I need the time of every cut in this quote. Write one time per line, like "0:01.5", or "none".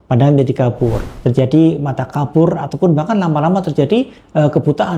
0:01.1